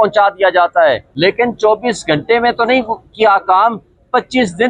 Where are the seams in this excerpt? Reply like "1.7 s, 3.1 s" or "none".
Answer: 1.1 s